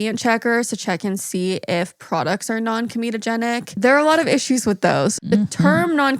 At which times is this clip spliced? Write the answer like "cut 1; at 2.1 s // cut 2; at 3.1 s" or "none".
cut 1; at 3.7 s // cut 2; at 5.2 s